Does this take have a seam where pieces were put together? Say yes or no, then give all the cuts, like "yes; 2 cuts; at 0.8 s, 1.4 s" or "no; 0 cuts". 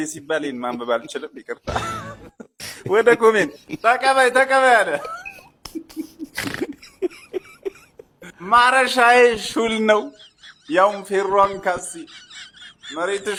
no; 0 cuts